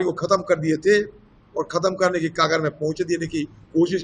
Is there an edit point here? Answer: no; 0 cuts

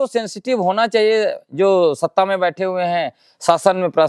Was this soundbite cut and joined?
no; 0 cuts

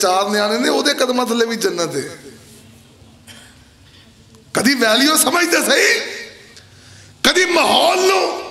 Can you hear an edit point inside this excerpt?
no; 0 cuts

